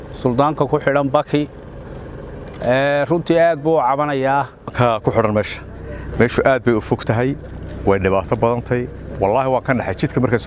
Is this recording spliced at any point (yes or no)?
yes